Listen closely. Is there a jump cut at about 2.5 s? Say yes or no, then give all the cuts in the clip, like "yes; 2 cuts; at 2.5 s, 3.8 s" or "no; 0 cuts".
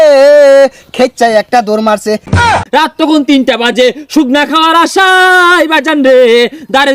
yes; 1 cut; at 2.5 s